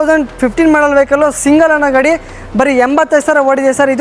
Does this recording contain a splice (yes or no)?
no